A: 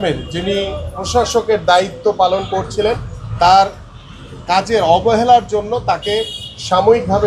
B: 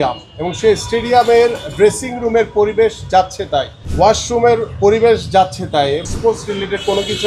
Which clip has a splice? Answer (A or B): B